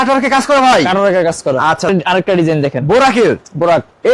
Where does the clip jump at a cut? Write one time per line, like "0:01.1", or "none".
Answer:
0:01.9